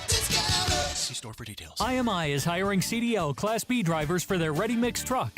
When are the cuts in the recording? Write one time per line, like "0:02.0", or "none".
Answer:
0:01.7